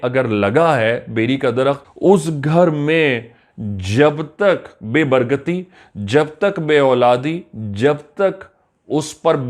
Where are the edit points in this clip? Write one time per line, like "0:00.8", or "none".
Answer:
0:01.9